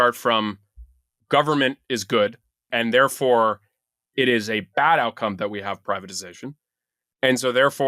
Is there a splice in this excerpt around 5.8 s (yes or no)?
yes